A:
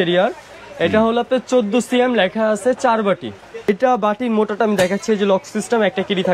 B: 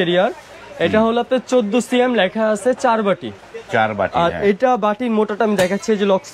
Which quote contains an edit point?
A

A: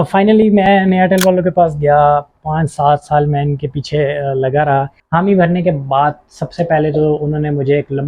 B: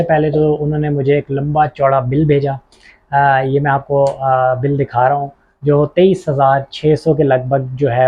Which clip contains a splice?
A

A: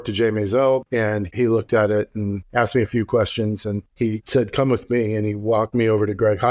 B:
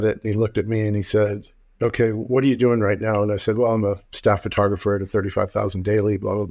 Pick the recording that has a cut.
A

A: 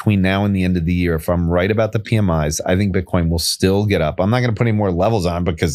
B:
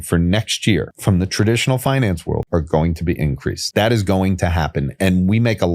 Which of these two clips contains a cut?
B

